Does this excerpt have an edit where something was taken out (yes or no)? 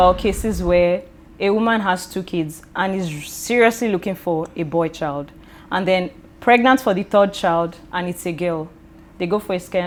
no